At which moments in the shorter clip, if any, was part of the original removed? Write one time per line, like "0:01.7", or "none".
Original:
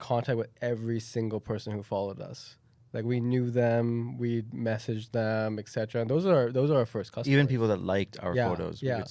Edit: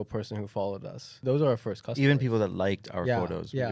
0:01.2